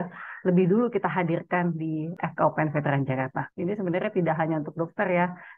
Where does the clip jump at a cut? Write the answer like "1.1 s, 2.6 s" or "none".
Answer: 2.1 s, 3.5 s